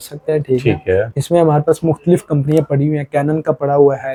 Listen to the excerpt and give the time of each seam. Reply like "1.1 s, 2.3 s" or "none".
none